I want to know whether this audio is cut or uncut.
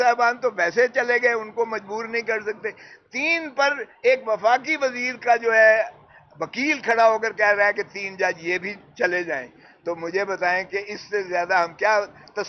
uncut